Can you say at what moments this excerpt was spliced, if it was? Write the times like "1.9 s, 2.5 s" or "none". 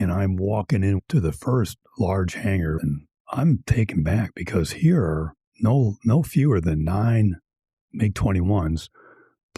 1.0 s, 2.8 s